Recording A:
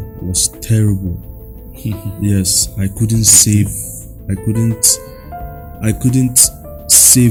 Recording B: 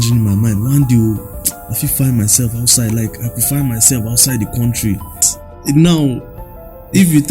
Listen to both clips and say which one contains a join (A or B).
B